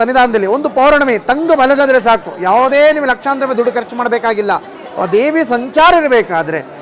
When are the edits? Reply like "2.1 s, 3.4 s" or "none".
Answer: none